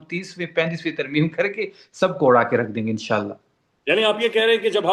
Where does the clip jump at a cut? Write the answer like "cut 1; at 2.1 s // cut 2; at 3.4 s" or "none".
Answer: none